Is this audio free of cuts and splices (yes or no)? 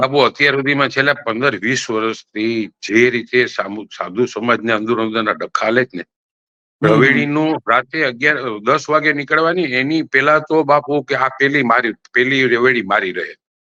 yes